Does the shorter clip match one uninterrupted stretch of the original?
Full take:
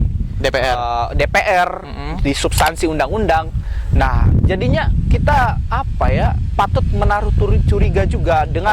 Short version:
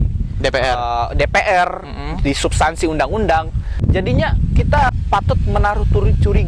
no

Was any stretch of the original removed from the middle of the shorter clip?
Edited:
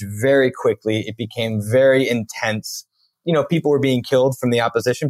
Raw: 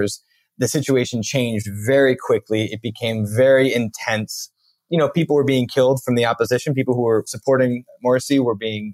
no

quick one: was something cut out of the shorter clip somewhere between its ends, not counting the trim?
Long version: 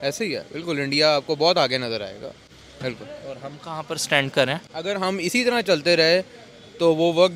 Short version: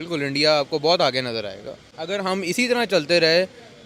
yes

